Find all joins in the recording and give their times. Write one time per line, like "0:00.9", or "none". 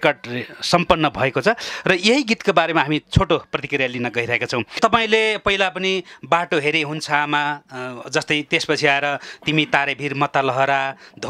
0:04.7